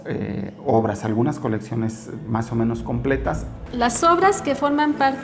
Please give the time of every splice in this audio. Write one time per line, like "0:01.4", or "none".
0:03.6